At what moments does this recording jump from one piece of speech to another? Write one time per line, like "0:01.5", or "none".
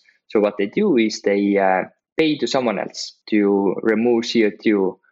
none